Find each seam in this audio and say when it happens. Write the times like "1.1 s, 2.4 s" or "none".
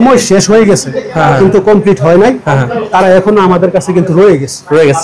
none